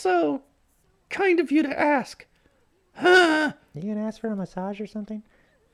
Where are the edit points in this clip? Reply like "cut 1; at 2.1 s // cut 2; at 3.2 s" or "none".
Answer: none

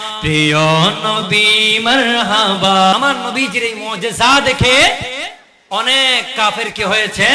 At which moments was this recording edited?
cut 1; at 2.9 s

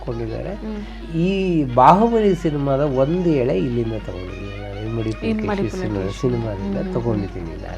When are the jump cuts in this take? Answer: none

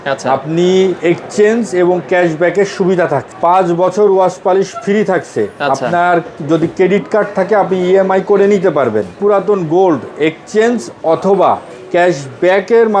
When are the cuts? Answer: cut 1; at 3.3 s // cut 2; at 9.1 s

